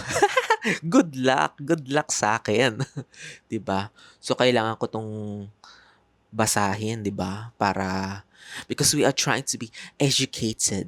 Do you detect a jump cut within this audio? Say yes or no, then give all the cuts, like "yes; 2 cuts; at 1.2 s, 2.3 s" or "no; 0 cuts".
no; 0 cuts